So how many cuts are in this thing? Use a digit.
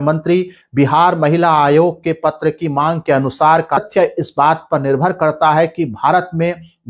1